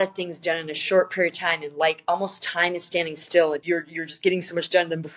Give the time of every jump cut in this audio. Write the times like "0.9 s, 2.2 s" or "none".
3.6 s